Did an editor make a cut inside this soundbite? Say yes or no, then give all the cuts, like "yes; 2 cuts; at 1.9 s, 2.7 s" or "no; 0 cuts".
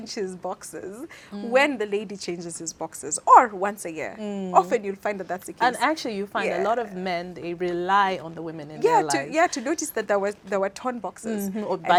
no; 0 cuts